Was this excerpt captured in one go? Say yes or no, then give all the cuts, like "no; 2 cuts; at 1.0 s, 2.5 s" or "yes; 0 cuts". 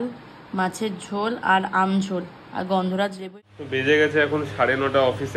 no; 1 cut; at 3.2 s